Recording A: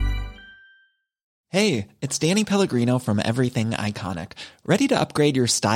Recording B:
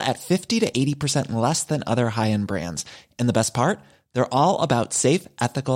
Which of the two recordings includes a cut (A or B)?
A